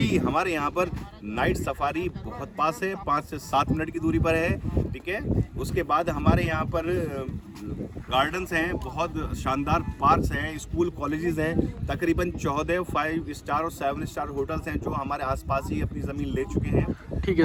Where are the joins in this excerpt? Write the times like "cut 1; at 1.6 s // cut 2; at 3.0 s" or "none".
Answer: none